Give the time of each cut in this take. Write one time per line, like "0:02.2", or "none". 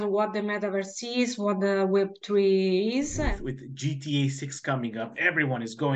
0:03.2